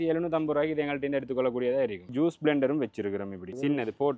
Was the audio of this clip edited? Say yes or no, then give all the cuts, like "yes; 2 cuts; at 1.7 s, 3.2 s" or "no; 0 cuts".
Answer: yes; 1 cut; at 2.1 s